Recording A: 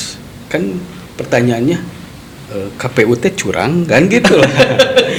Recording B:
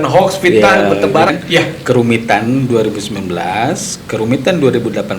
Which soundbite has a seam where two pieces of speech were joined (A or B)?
B